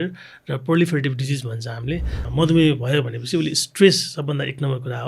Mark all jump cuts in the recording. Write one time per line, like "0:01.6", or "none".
0:02.2